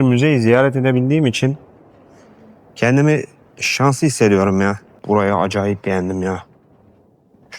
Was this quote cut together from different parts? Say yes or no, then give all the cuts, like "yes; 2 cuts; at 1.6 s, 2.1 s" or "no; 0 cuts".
yes; 1 cut; at 4.9 s